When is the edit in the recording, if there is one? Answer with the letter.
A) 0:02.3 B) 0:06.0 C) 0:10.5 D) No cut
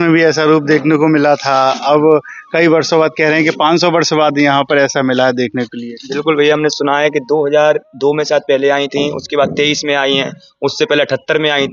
D